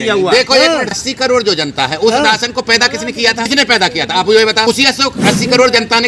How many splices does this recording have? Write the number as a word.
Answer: three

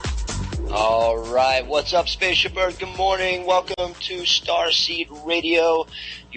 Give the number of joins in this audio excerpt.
one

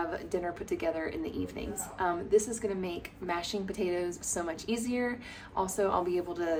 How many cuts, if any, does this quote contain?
zero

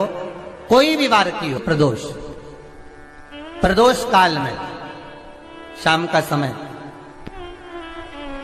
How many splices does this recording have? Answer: one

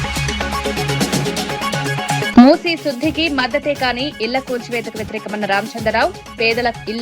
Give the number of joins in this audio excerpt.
one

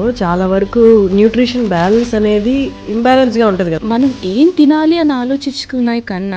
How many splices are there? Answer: two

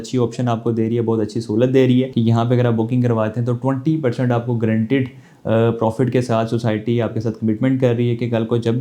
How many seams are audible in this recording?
one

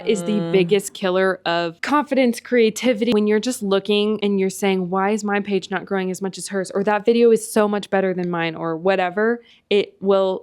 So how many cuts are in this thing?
three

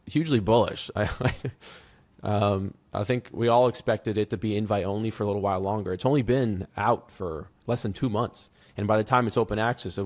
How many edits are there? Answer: zero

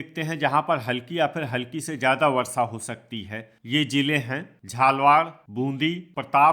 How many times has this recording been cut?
two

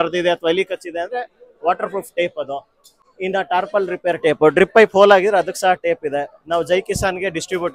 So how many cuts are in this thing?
zero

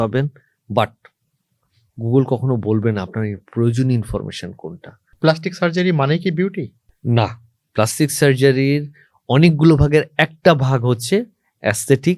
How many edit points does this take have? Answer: one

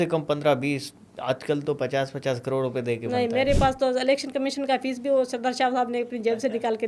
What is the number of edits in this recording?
zero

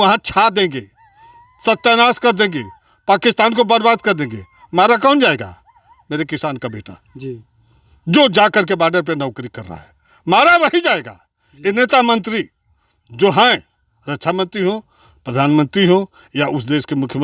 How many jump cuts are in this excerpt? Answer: zero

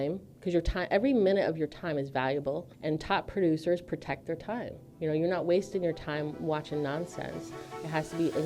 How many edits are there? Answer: two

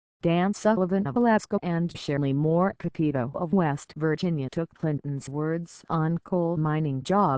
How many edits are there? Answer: one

